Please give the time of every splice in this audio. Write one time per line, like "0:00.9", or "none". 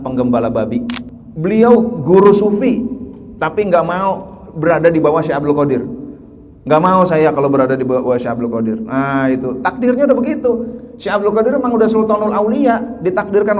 0:01.0